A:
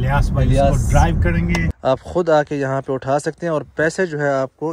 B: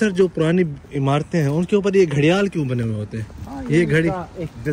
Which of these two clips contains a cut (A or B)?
A